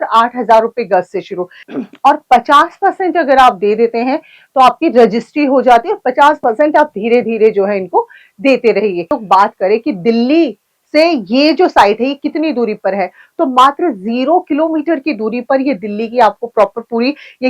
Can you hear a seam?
yes; 2 cuts; at 1.7 s, 9.2 s

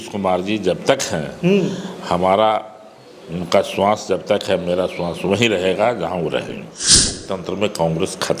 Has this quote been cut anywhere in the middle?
yes; 1 cut; at 7.2 s

